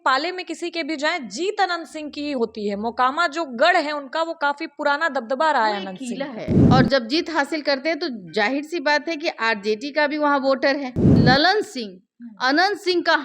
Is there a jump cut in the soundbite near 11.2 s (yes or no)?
yes